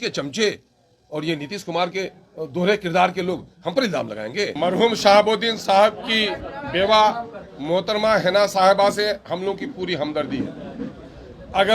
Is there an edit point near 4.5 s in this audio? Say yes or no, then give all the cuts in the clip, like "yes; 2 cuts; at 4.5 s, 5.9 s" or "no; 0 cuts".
yes; 1 cut; at 4.5 s